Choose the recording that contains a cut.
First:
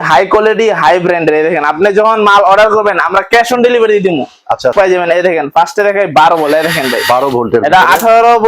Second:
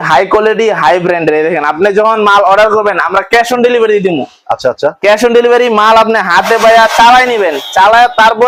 first; 1 cut; at 4.7 s

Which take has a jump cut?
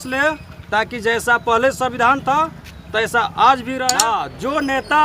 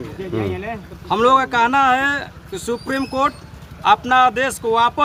first; 1 cut; at 4.0 s

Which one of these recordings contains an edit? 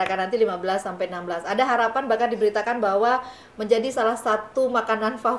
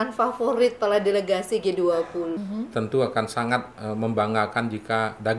second; 1 cut; at 2.4 s

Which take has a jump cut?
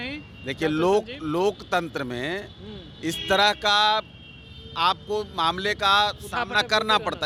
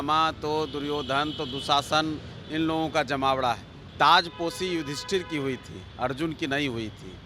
second; 1 cut; at 3.8 s

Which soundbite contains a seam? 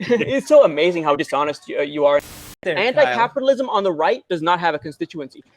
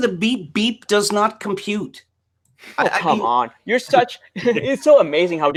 first; 1 cut; at 2.3 s

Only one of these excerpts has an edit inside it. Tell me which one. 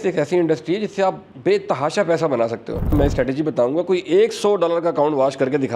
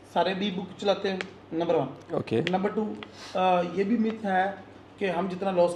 first; 2 cuts; at 1.3 s, 2.9 s

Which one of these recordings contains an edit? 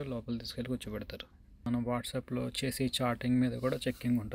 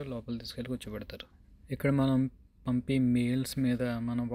first; 1 cut; at 1.6 s

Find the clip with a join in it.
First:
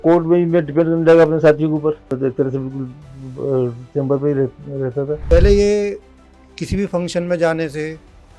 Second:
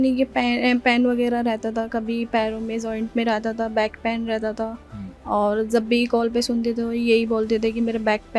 first; 2 cuts; at 2.1 s, 5.2 s

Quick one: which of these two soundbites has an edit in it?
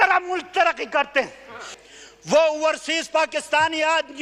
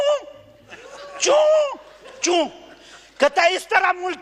first; 1 cut; at 1.7 s

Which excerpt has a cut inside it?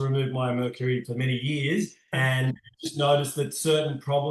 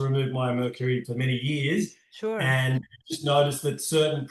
first; 1 cut; at 2.1 s

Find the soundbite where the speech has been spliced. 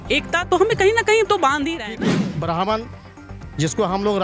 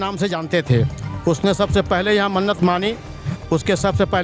first; 1 cut; at 2.0 s

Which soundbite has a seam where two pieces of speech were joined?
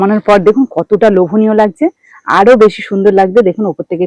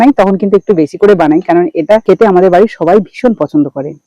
second; 1 cut; at 2.0 s

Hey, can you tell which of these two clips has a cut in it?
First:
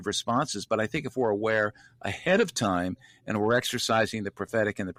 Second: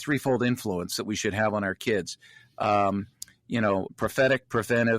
second; 1 cut; at 3.9 s

